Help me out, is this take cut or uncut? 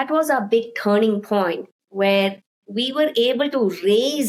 uncut